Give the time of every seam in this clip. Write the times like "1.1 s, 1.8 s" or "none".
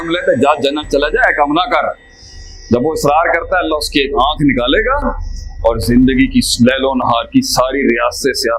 none